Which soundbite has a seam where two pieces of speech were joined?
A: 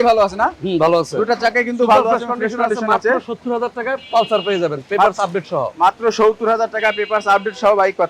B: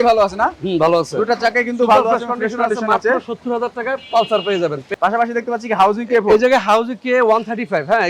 B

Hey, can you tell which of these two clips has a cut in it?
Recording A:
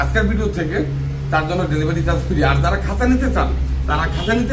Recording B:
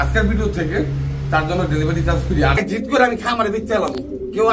B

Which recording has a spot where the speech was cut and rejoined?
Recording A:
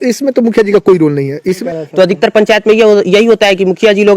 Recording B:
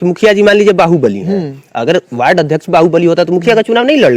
A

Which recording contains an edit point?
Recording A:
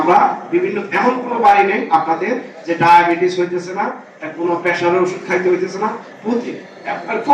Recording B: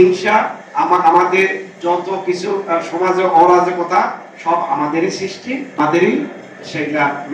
B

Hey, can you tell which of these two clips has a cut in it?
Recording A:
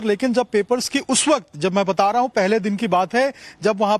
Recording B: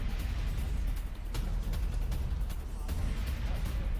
B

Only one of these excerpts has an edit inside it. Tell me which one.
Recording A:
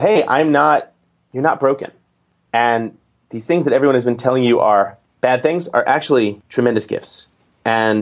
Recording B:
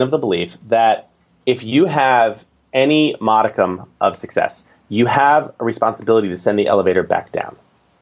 A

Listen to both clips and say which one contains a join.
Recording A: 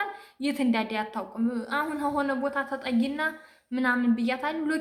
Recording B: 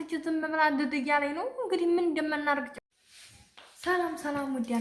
B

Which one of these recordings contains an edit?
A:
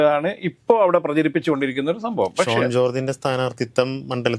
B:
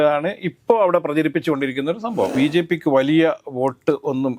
B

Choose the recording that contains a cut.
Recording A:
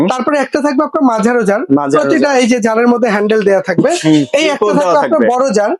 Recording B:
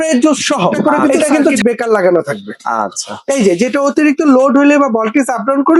B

